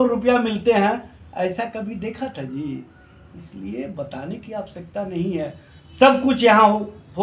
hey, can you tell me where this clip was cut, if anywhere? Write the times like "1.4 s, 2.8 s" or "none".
none